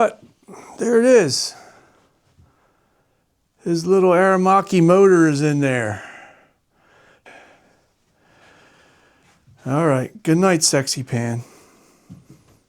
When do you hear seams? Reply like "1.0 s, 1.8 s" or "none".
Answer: 7.2 s